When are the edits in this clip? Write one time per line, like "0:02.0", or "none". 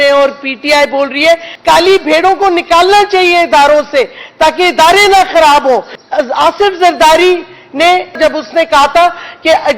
0:01.5
0:06.0
0:08.2